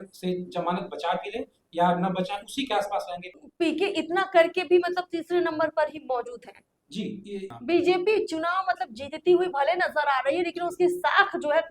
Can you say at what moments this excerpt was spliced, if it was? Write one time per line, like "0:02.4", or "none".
0:03.4
0:07.6